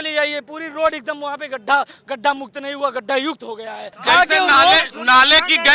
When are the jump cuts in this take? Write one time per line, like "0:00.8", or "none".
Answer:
0:03.9